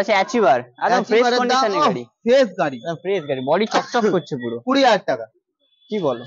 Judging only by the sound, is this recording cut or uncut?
uncut